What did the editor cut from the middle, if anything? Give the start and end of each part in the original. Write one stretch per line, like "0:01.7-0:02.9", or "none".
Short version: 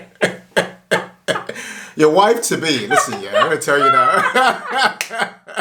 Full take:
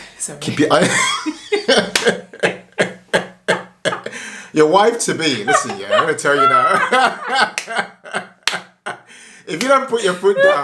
none

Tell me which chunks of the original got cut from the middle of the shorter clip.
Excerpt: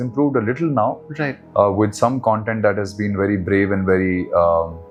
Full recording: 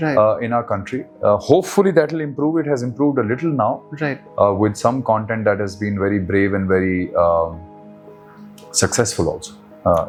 none

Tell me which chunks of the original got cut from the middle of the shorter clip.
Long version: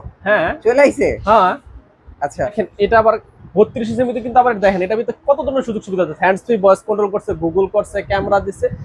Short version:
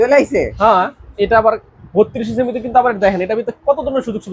0:01.7-0:02.7

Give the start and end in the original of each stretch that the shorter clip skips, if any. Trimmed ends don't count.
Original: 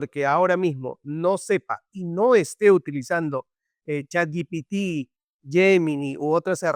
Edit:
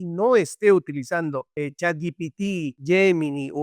0:03.5-0:03.8
0:05.1-0:05.4

